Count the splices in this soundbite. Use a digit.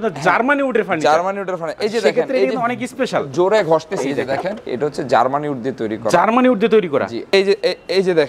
2